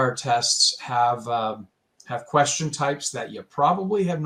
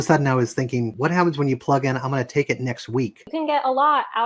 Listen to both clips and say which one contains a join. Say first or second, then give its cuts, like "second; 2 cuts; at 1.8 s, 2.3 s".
second; 2 cuts; at 0.9 s, 3.2 s